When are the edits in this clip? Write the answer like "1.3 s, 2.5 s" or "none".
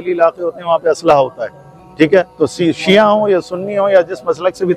none